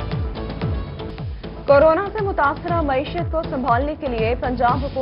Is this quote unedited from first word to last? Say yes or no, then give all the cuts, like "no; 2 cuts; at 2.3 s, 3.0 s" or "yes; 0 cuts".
no; 1 cut; at 1.1 s